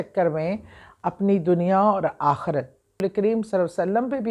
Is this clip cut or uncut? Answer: cut